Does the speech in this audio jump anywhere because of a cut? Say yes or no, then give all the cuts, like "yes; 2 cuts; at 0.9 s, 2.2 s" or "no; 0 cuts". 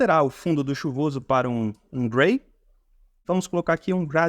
yes; 1 cut; at 3.2 s